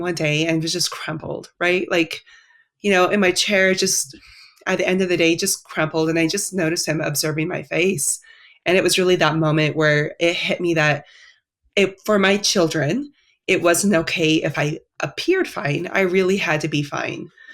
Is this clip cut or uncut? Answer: uncut